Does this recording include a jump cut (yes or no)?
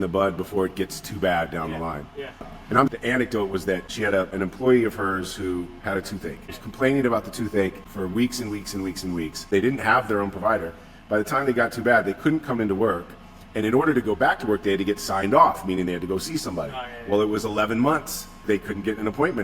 yes